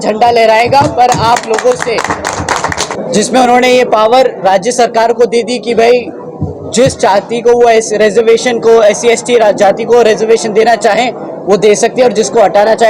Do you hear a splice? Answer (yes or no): yes